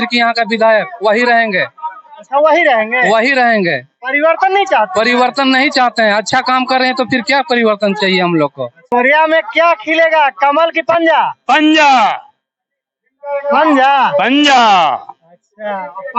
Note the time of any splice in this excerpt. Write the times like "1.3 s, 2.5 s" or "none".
8.8 s